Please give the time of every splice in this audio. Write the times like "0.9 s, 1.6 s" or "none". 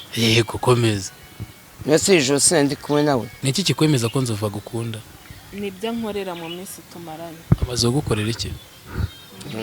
3.4 s

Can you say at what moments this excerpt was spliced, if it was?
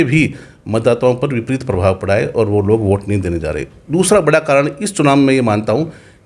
none

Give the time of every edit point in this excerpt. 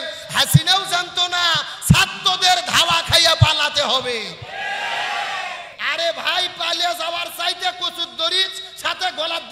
none

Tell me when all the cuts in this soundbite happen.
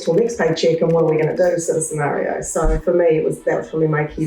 2.8 s

